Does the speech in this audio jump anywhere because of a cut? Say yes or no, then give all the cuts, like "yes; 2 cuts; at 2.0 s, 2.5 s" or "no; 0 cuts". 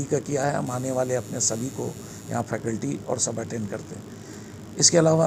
no; 0 cuts